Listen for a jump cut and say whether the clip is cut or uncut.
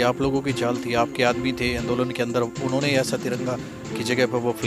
uncut